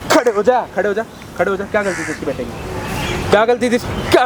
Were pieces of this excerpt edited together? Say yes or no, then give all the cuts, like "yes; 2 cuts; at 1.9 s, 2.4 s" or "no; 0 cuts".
no; 0 cuts